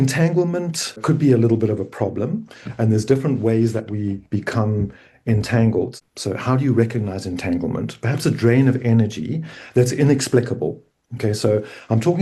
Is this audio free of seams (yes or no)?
no